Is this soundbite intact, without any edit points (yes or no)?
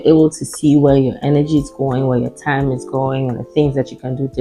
yes